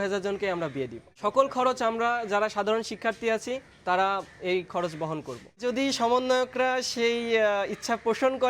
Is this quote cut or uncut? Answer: cut